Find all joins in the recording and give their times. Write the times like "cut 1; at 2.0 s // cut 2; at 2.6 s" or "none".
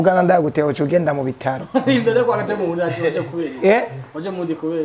none